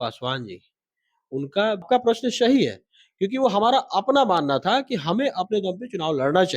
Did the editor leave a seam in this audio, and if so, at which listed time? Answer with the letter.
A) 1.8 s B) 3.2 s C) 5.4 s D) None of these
A